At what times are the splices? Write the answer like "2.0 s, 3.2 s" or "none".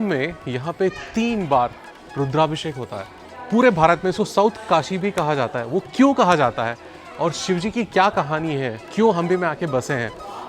3.3 s